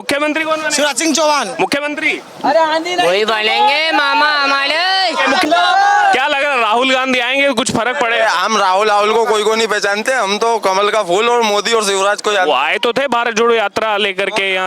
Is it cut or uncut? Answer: cut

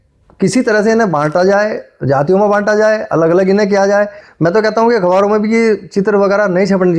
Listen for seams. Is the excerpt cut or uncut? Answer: cut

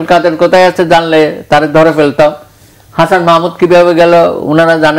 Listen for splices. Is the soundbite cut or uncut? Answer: uncut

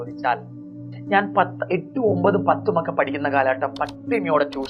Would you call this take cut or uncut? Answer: cut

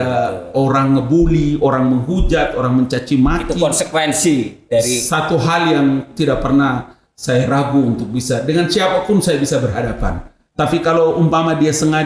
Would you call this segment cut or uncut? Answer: cut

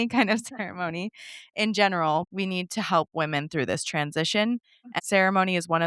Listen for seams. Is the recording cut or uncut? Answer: cut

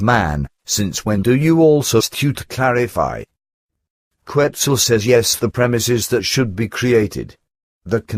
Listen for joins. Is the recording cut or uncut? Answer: uncut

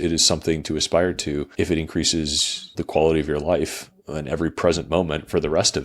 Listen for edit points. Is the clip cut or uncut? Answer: cut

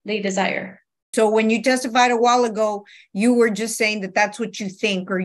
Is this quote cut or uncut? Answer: cut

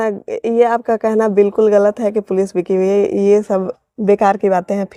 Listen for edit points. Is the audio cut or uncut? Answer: uncut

